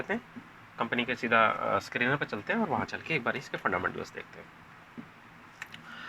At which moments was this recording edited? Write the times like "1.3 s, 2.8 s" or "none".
none